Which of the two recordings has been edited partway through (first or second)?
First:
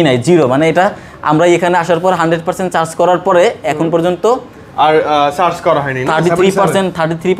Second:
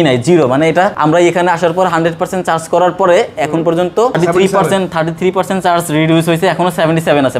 second